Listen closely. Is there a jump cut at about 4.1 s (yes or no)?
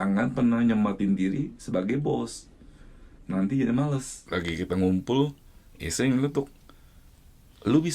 yes